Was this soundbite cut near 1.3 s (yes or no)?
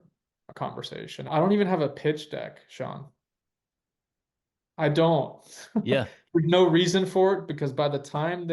yes